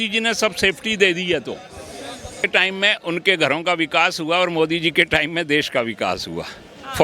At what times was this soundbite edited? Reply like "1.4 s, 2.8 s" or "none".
2.5 s